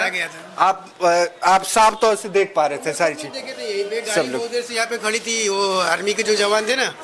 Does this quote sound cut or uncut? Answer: uncut